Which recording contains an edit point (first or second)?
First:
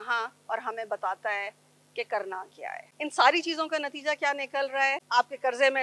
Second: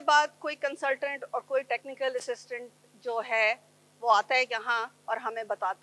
first